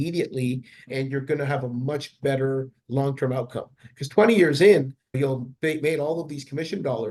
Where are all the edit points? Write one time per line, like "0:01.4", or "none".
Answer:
none